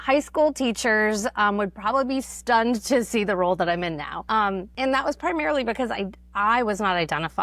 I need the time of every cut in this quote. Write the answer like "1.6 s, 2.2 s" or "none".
4.5 s